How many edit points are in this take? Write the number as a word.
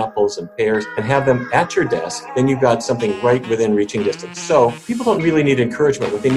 three